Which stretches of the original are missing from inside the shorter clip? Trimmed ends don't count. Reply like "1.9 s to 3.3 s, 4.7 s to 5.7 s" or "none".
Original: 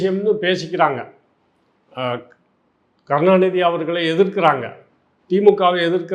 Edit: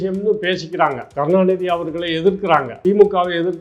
1.0 s to 3.0 s, 4.7 s to 5.2 s